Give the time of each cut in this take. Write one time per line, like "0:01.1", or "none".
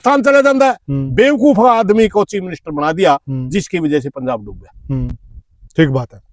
none